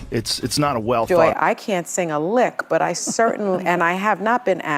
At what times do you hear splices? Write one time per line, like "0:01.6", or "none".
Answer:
0:01.1